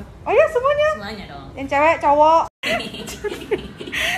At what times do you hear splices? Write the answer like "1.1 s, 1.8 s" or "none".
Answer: 2.6 s